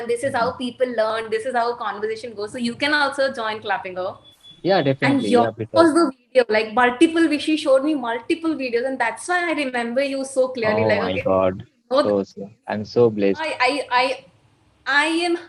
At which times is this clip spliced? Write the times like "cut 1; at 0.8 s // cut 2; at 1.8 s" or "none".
cut 1; at 13.5 s